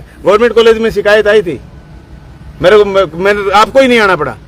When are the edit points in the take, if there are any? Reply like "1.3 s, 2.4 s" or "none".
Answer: none